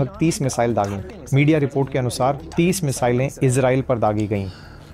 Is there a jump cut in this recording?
no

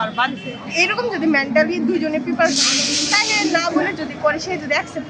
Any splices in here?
no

